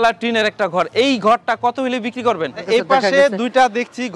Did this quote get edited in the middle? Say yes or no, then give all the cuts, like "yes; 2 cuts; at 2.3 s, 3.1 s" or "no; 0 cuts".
yes; 1 cut; at 2.5 s